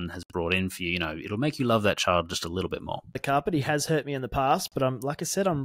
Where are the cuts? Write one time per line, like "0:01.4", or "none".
0:03.2